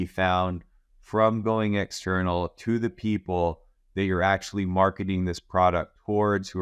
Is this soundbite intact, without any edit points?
yes; 0 cuts

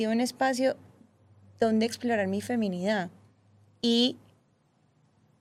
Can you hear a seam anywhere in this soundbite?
no; 0 cuts

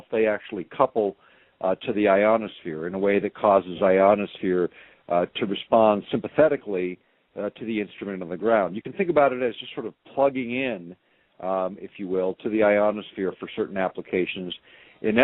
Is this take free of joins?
yes; 0 cuts

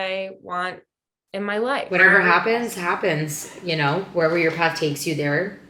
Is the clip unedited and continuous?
yes; 0 cuts

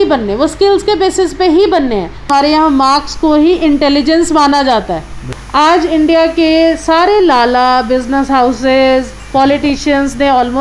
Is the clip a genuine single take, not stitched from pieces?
no; 2 cuts; at 2.2 s, 5.2 s

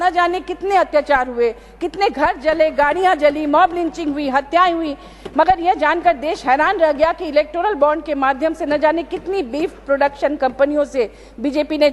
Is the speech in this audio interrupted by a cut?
no; 0 cuts

